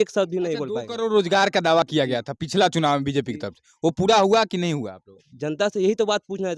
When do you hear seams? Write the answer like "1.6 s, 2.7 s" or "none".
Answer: none